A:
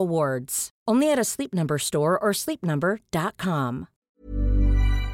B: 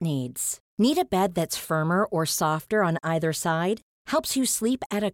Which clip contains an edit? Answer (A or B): A